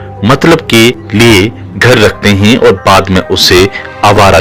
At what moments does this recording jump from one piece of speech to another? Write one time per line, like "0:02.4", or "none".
0:01.0